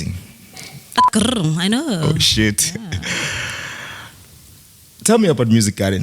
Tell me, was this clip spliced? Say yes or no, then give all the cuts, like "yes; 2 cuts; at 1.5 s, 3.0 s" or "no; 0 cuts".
yes; 1 cut; at 1.0 s